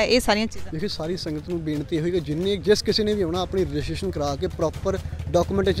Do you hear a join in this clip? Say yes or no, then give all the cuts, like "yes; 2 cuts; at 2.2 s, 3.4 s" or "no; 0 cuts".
no; 0 cuts